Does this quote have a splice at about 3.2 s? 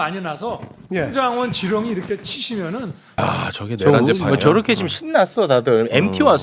yes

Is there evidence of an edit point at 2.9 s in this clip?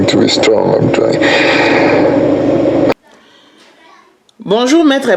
yes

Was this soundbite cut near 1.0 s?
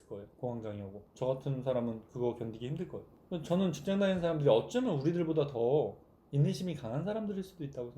yes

